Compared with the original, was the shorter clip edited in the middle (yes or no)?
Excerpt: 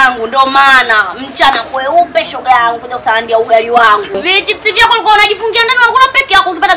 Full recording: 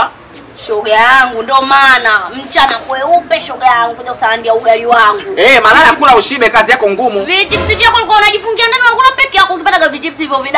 yes